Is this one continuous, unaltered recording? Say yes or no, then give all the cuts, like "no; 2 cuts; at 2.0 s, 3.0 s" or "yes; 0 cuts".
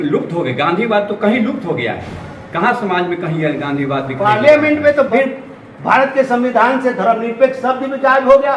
no; 1 cut; at 5.1 s